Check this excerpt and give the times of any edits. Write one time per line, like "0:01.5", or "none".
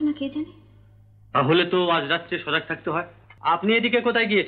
0:03.3